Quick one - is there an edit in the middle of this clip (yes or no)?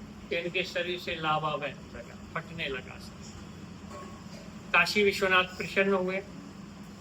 no